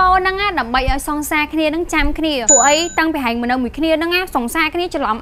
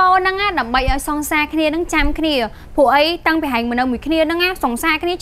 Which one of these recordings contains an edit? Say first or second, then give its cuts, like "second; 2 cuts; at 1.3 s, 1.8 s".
first; 1 cut; at 2.4 s